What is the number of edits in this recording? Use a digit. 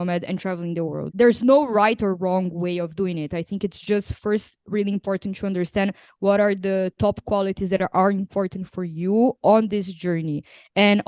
1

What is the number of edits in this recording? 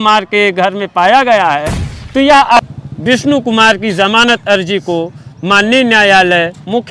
1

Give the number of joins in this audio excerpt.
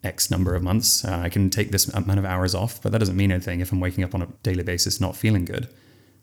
1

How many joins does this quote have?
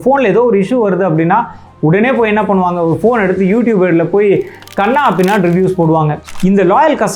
2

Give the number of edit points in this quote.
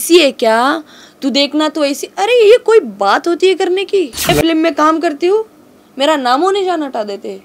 1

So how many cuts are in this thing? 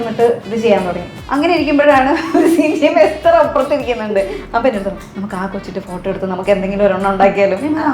1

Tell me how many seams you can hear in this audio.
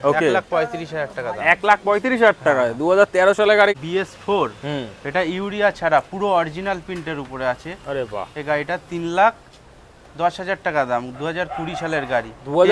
1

